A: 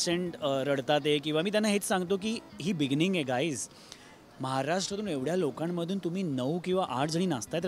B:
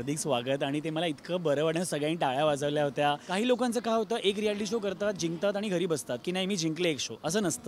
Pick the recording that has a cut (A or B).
B